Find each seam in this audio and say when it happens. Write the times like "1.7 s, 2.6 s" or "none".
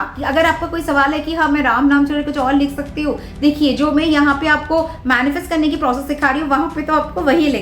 none